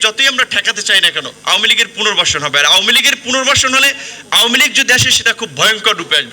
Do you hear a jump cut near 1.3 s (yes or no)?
yes